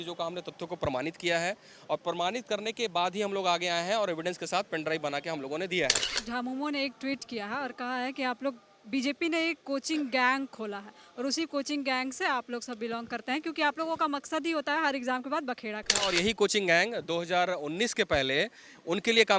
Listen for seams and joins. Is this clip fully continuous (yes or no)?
no